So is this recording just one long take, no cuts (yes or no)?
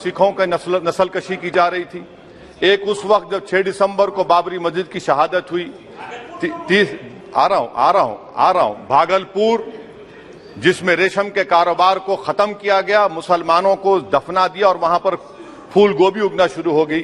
yes